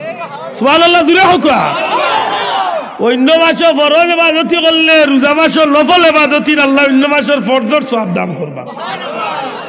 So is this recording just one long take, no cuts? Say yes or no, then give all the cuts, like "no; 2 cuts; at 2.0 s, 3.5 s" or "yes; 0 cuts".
yes; 0 cuts